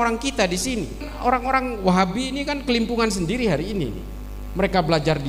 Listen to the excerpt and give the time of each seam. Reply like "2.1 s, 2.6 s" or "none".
1.0 s